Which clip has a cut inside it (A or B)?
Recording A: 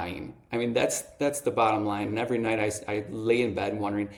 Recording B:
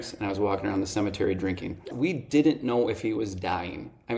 B